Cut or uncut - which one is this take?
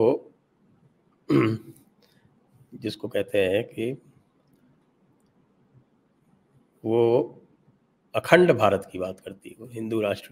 uncut